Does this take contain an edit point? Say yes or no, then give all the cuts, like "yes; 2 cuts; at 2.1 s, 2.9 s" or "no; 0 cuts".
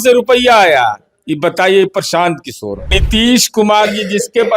yes; 1 cut; at 3.0 s